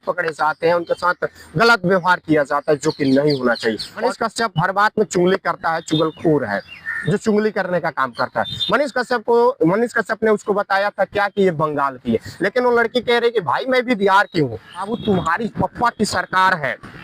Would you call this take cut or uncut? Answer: cut